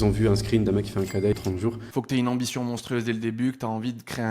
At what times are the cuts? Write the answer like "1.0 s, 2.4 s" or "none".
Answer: 1.3 s